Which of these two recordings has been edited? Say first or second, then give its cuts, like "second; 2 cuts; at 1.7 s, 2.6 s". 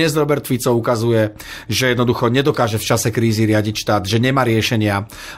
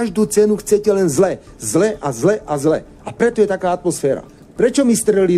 second; 1 cut; at 4.4 s